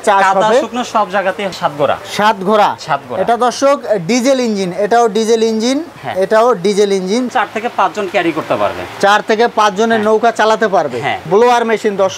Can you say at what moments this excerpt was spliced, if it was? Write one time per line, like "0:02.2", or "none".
0:01.5
0:07.3
0:11.3